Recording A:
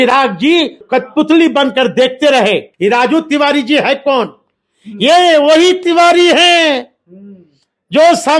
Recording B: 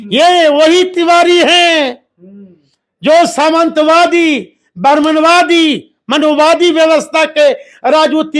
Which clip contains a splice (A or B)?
A